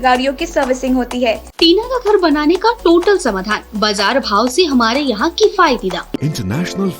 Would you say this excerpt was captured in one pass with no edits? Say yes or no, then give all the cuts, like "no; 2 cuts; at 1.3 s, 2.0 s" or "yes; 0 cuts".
no; 2 cuts; at 1.5 s, 6.2 s